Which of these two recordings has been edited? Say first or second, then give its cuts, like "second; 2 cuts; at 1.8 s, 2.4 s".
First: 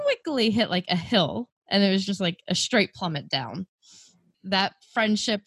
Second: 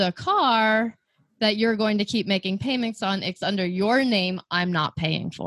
first; 1 cut; at 4.3 s